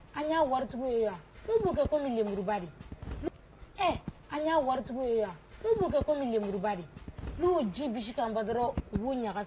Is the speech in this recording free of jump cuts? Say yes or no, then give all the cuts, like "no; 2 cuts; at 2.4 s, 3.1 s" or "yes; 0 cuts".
no; 1 cut; at 3.3 s